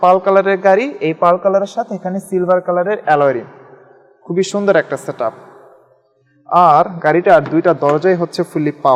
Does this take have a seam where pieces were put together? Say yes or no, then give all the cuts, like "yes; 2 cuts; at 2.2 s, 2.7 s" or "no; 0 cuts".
no; 0 cuts